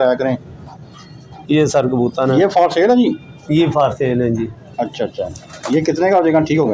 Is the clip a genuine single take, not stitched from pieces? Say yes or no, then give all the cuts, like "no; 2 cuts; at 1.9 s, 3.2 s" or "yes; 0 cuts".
yes; 0 cuts